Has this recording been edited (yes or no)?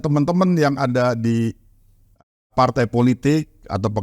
no